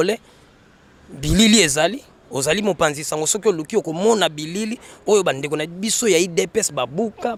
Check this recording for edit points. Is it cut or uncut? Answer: uncut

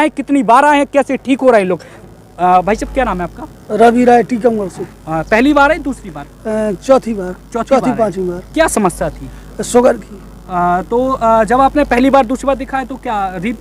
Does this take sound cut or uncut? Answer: uncut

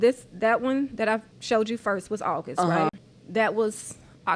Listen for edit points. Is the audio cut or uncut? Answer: cut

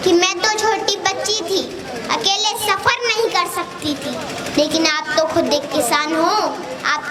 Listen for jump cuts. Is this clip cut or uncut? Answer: uncut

